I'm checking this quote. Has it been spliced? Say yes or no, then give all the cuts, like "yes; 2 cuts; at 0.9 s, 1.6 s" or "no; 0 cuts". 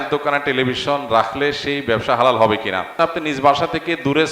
yes; 1 cut; at 2.8 s